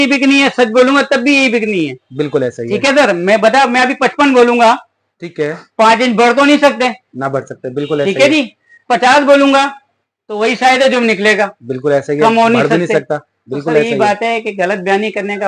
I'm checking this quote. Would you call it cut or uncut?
uncut